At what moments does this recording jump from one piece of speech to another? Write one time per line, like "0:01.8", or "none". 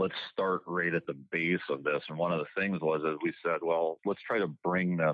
0:04.0

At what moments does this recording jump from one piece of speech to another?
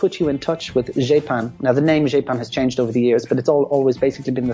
none

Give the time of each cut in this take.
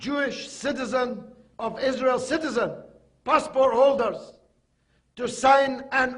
0:02.7

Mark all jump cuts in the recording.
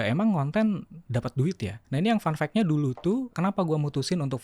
0:01.7
0:03.3

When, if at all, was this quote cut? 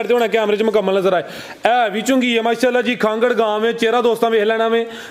none

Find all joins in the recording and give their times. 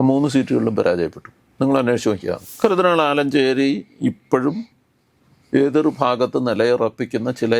0:02.5

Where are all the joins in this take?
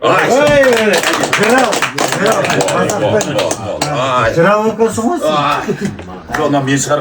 none

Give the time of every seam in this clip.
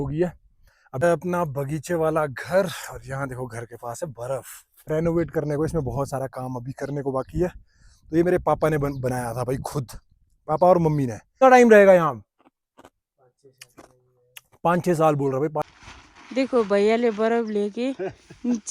0:01.0
0:04.8
0:11.4
0:15.7

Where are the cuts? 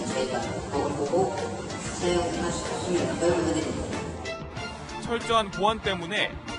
0:01.2

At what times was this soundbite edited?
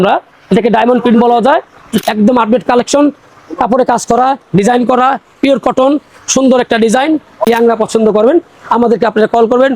0:01.9
0:07.5

